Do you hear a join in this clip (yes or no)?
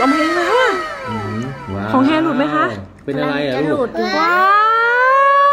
no